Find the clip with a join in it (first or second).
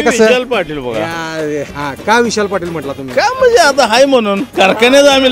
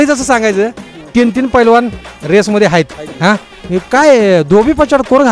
first